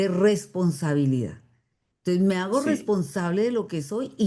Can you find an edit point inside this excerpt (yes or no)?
no